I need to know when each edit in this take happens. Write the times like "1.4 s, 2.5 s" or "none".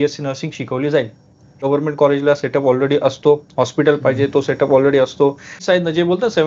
1.5 s, 5.5 s